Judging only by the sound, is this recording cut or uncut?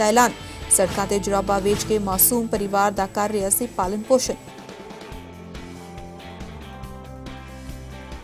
uncut